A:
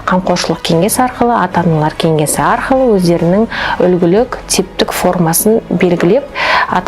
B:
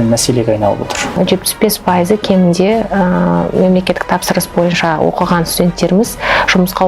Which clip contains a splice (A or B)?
B